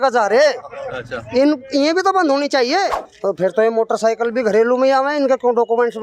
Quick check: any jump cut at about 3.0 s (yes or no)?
yes